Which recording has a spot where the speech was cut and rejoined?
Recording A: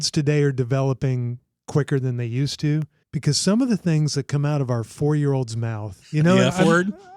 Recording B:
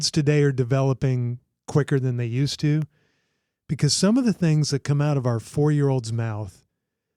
A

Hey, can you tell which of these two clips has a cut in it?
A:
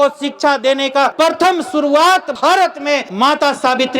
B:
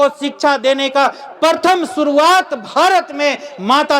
A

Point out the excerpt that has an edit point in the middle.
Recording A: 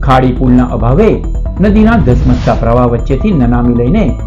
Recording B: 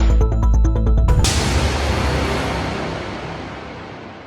B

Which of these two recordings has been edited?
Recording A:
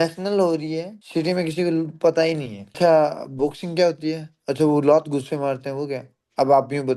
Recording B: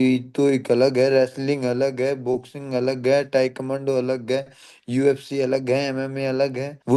A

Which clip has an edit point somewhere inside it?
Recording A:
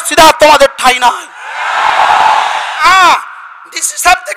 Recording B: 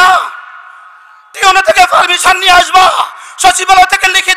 A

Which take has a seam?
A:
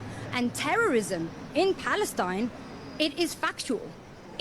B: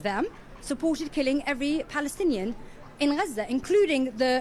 A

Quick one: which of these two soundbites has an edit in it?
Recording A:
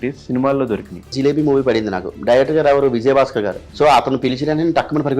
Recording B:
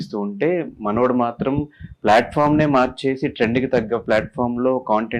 A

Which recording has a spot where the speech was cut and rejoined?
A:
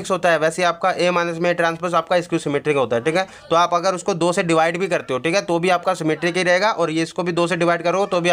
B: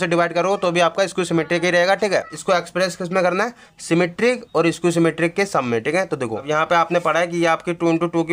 B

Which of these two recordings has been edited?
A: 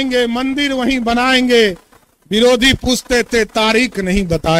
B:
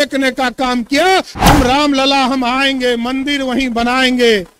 B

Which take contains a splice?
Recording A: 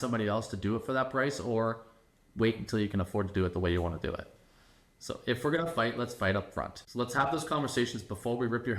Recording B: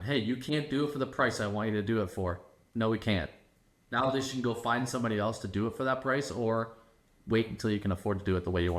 A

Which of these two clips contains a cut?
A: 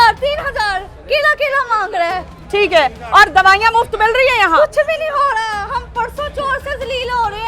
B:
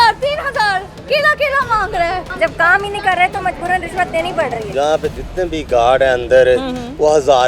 B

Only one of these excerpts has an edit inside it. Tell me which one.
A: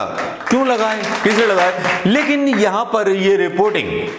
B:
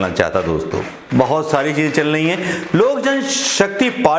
B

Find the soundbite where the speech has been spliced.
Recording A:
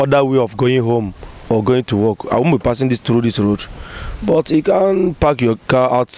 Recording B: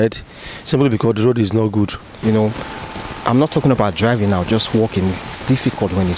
B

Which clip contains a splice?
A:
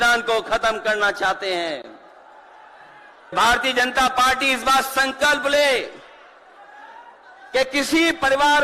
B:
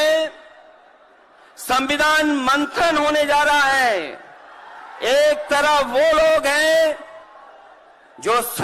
A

